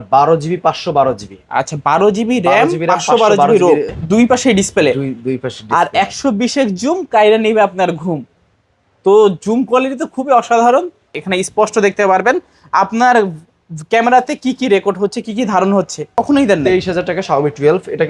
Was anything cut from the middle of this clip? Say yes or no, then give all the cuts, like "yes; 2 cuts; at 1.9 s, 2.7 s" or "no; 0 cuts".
yes; 3 cuts; at 3.9 s, 11.1 s, 16.2 s